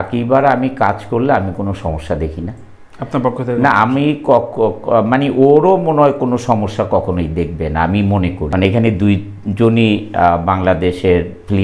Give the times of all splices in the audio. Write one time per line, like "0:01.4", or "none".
0:08.5